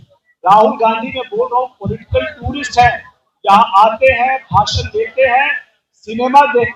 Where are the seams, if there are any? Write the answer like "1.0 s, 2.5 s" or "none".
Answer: none